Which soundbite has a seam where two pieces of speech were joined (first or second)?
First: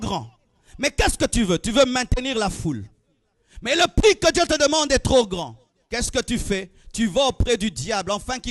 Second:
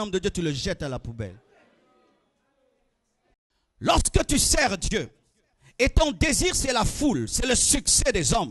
second